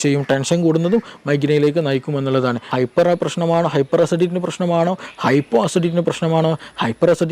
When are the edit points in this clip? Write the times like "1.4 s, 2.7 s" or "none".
2.6 s